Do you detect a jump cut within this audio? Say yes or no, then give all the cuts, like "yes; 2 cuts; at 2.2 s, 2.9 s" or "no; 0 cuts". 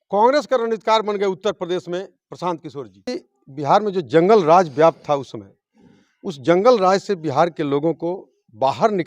yes; 1 cut; at 3.1 s